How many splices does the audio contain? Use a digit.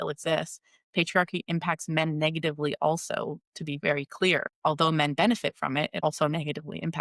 2